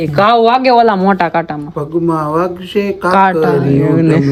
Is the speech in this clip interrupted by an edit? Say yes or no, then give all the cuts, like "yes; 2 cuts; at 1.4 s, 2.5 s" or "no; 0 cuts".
no; 0 cuts